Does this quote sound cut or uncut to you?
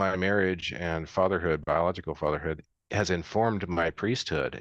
uncut